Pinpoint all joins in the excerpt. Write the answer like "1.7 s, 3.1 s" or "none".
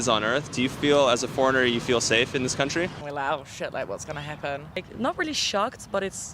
3.0 s, 4.8 s